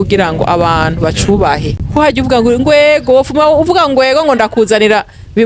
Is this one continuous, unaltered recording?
no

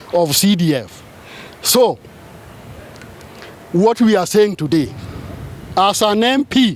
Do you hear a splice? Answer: no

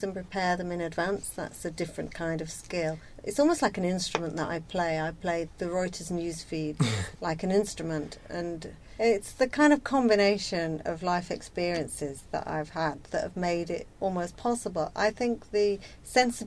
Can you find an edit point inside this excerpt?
yes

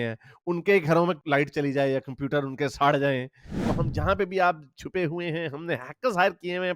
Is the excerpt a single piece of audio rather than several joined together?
no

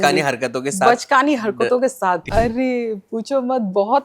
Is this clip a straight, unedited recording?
no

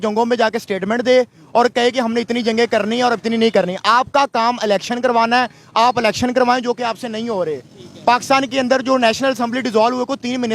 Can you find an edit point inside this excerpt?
no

